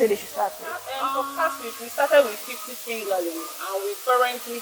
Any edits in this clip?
yes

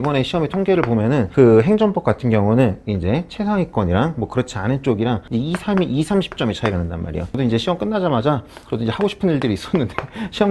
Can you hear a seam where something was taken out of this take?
yes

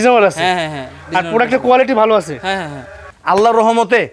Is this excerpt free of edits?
no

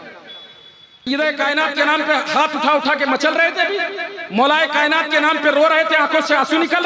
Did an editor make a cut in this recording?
yes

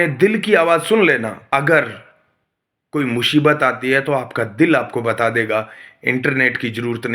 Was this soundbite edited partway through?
yes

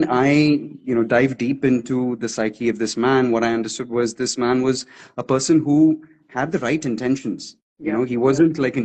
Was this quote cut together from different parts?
no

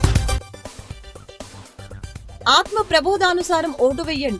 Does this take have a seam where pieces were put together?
no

